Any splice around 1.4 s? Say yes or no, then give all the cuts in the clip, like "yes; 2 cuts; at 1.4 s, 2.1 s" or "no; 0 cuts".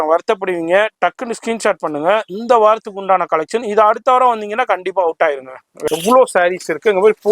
no; 1 cut; at 5.7 s